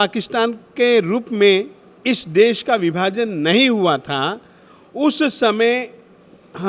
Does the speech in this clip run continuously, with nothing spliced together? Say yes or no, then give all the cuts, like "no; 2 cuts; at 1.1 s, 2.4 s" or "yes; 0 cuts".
yes; 0 cuts